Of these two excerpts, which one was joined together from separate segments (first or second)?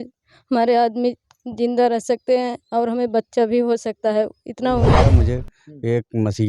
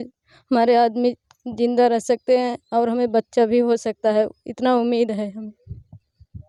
first